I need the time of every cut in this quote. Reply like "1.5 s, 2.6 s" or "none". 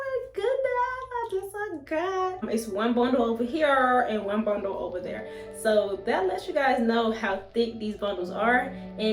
2.4 s